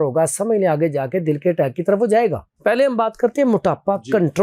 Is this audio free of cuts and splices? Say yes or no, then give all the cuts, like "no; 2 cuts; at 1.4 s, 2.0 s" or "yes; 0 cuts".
no; 1 cut; at 2.5 s